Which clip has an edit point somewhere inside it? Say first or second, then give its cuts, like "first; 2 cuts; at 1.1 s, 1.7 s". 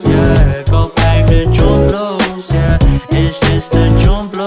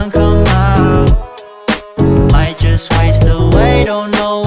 first; 1 cut; at 0.9 s